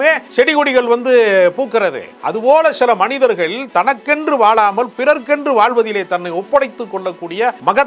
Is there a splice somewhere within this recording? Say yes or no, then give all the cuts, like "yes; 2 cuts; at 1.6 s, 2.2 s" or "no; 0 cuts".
no; 0 cuts